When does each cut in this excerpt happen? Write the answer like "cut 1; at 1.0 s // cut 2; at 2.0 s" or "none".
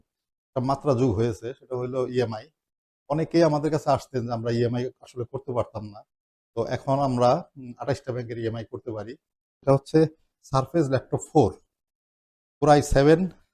cut 1; at 9.5 s